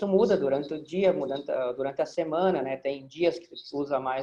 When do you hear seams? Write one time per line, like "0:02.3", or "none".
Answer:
none